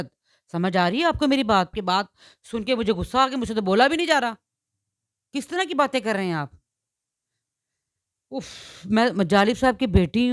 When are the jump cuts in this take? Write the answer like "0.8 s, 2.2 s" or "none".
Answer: 1.8 s